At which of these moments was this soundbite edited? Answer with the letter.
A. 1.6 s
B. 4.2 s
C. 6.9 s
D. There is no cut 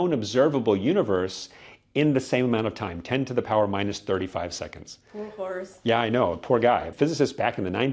C